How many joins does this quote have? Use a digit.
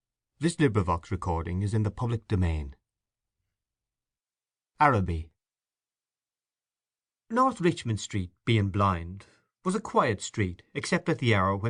0